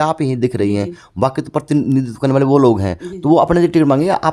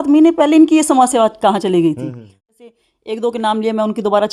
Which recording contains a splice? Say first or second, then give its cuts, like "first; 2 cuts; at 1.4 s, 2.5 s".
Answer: second; 1 cut; at 2.5 s